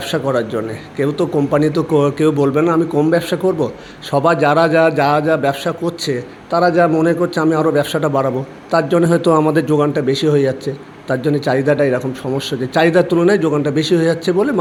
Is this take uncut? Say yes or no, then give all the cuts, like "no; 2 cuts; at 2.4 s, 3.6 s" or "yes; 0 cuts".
yes; 0 cuts